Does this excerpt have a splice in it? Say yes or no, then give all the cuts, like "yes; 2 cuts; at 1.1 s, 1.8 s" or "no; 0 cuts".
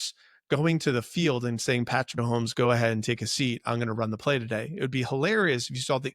yes; 1 cut; at 2.1 s